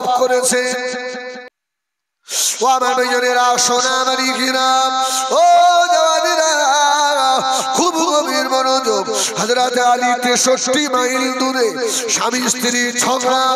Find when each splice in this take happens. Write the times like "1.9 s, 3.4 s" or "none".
1.5 s